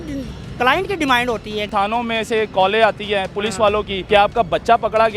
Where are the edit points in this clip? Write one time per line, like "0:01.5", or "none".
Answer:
0:01.7
0:04.0

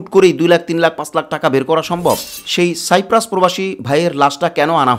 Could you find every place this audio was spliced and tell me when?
0:02.4

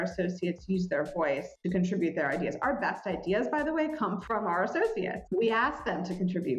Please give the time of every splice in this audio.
0:04.2

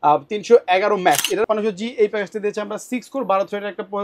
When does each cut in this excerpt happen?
0:01.5

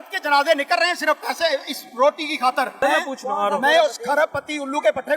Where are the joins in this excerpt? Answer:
0:02.8

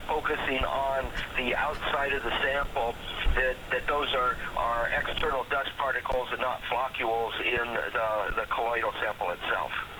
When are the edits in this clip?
none

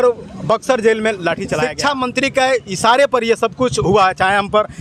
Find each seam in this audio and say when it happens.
0:01.6

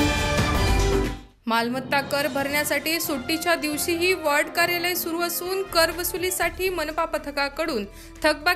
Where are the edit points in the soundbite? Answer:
0:00.9

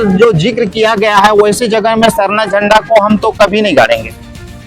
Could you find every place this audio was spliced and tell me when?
none

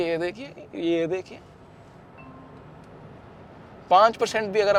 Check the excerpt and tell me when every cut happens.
none

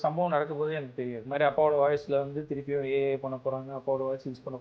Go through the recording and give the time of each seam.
0:01.2

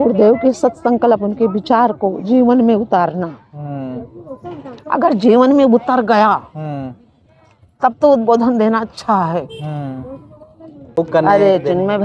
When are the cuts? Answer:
0:11.0

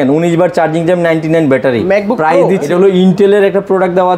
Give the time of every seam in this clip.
0:02.6

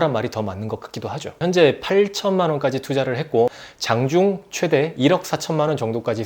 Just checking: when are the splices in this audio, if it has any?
0:01.4
0:03.7

